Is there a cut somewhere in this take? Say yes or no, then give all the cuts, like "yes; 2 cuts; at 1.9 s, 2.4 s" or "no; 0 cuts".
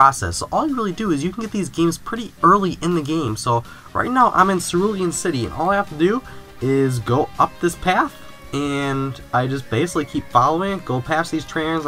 yes; 1 cut; at 1.8 s